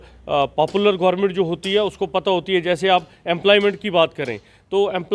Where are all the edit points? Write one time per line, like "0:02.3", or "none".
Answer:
none